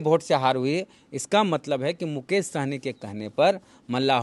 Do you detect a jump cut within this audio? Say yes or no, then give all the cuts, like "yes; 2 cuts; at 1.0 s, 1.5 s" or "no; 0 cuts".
no; 0 cuts